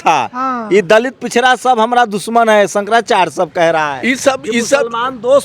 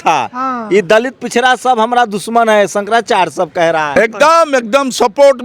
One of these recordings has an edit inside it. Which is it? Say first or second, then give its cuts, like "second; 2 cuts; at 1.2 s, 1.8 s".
second; 1 cut; at 3.9 s